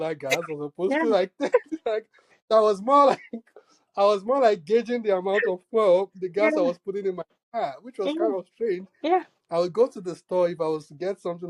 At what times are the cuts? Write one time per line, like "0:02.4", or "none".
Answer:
none